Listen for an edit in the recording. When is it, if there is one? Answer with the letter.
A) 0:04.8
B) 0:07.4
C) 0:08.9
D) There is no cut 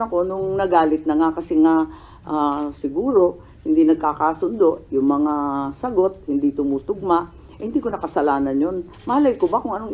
D